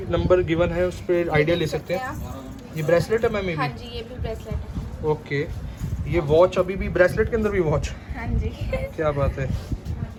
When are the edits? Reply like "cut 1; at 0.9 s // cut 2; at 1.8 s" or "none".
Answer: none